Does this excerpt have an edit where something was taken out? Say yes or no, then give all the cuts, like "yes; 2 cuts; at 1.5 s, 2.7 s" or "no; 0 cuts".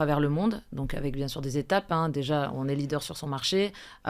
no; 0 cuts